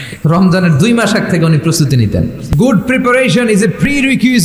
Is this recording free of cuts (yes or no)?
no